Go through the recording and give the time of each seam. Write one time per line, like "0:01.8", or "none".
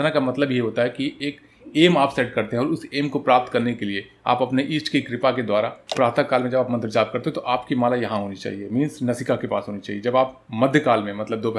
0:05.9